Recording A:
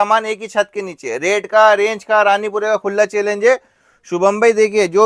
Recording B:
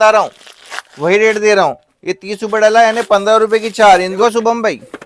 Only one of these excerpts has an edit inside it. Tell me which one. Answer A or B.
B